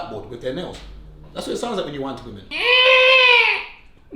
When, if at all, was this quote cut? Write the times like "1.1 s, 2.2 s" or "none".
2.5 s